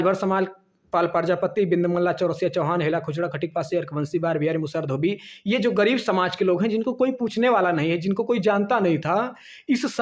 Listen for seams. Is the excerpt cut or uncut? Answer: uncut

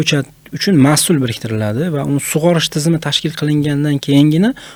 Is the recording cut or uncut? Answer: uncut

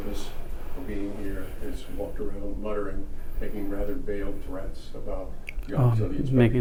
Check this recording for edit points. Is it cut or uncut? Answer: uncut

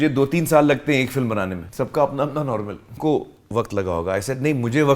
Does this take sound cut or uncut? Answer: cut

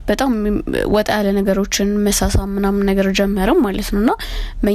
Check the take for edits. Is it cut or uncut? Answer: uncut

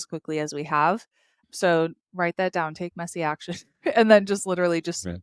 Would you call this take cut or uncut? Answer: uncut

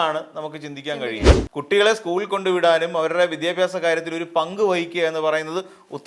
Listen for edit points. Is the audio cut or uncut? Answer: cut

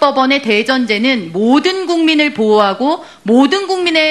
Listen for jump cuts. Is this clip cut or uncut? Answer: cut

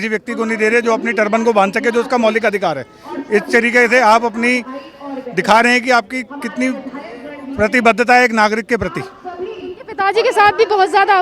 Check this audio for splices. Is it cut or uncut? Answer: uncut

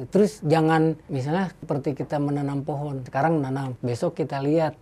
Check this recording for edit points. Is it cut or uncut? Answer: cut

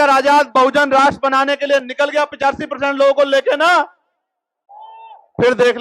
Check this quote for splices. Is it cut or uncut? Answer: uncut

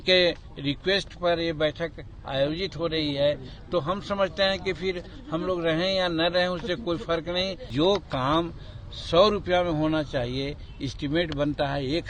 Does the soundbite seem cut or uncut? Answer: cut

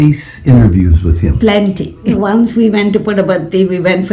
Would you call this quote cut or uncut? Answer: cut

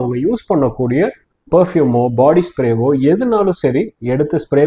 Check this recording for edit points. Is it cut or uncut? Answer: uncut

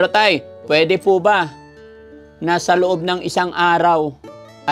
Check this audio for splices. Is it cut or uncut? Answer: uncut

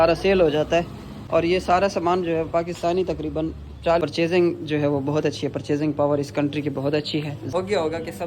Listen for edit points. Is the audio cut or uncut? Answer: cut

